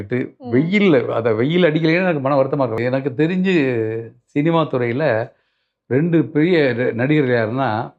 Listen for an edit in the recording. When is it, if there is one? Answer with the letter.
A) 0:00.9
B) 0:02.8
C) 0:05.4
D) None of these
B